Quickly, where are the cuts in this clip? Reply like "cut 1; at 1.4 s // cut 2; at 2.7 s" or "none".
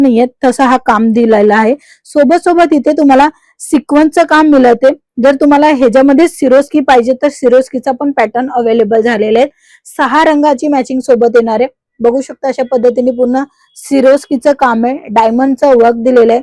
none